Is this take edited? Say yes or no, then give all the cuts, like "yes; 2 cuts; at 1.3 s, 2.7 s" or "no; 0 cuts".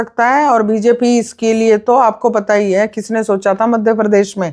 no; 0 cuts